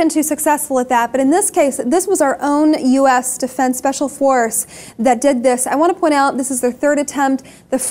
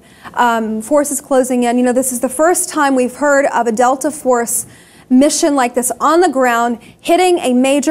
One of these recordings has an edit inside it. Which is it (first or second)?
second